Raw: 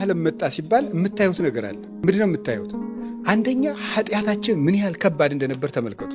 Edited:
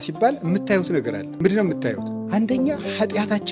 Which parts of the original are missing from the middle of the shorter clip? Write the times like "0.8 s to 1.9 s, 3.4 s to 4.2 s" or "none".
1.7 s to 1.9 s, 2.7 s to 3.1 s